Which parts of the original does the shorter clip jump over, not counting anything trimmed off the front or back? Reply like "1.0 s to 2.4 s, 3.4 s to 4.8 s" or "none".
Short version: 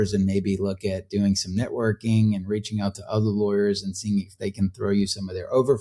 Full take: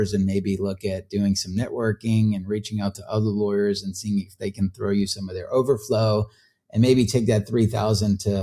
none